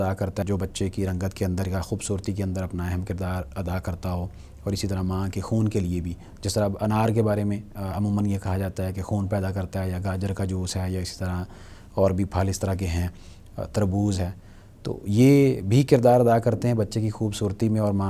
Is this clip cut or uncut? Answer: uncut